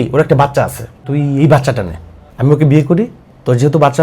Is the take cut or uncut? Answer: cut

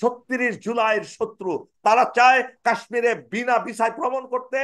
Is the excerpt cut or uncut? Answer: cut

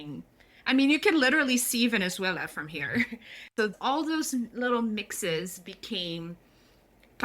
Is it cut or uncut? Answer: cut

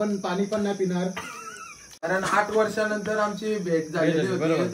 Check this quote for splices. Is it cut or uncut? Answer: cut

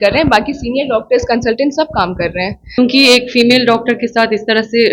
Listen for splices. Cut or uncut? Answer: cut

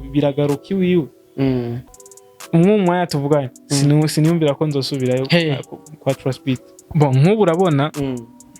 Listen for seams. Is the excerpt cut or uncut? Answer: cut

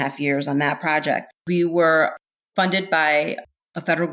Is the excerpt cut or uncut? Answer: cut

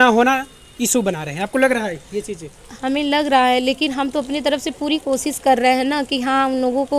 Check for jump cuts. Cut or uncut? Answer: uncut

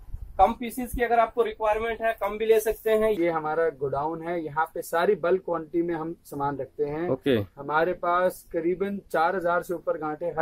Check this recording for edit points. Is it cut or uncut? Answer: cut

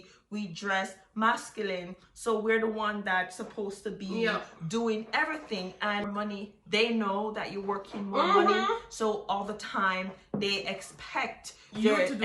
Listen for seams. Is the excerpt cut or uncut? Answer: cut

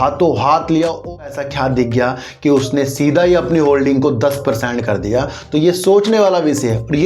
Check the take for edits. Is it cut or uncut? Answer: cut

